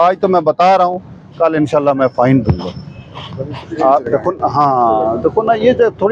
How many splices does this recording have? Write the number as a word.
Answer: zero